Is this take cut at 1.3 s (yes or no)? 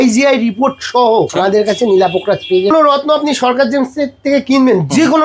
yes